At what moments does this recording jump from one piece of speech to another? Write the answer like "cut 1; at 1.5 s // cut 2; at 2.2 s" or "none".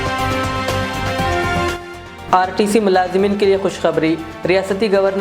none